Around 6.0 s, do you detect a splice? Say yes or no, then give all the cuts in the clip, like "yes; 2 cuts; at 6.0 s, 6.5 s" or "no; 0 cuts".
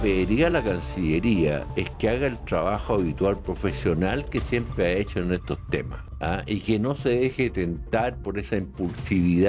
yes; 1 cut; at 6.0 s